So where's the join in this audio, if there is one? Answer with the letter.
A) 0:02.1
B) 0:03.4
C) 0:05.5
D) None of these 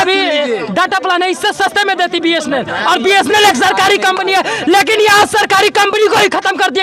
D